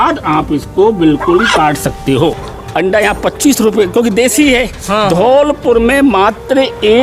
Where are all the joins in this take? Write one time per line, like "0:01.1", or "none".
0:02.4

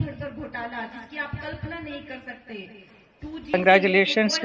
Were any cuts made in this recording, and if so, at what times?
0:03.5

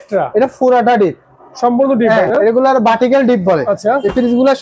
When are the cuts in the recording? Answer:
none

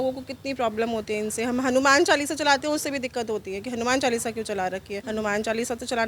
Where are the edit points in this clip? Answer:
0:05.0

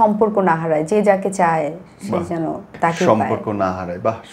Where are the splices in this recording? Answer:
0:02.7

